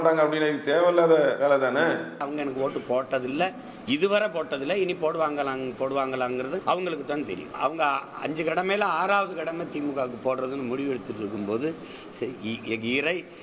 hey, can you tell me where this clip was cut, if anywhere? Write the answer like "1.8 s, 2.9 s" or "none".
2.3 s, 6.6 s, 7.5 s